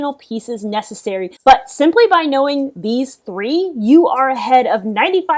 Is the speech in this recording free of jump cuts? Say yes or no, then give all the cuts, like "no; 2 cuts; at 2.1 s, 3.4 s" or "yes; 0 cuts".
no; 1 cut; at 1.3 s